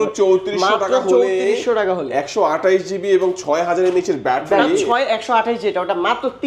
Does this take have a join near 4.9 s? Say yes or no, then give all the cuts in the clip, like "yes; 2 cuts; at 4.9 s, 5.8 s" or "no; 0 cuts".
yes; 1 cut; at 4.9 s